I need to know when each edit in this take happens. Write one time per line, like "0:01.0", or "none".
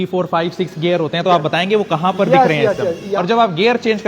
0:03.1